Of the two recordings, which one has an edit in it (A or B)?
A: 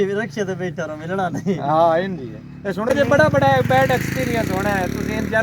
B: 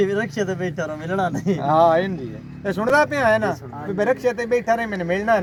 A